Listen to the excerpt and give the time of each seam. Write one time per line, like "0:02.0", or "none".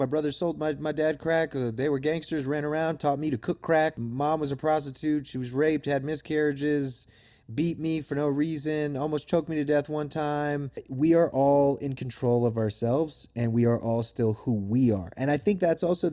0:03.9
0:10.8

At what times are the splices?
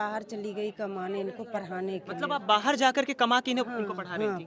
none

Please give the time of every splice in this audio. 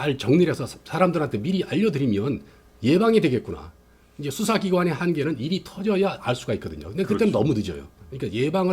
none

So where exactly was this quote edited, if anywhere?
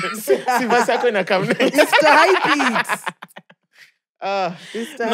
none

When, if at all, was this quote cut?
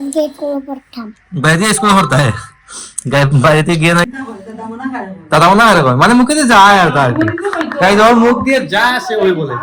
0:04.1

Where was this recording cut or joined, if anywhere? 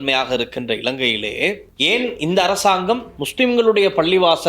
0:01.7
0:03.2

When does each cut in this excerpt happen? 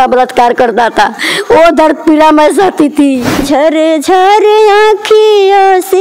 0:03.3

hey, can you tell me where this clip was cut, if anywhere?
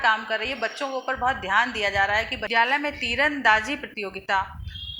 0:02.4

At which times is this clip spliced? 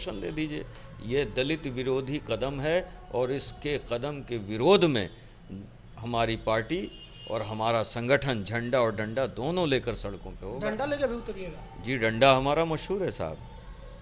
none

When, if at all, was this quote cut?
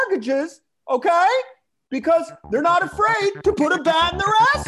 none

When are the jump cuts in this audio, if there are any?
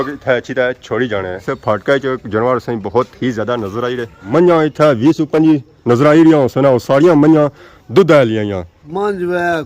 0:01.5
0:04.2
0:08.8

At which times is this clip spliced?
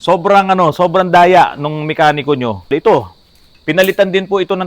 0:02.6

